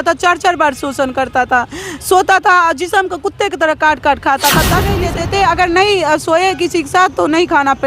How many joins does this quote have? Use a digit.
1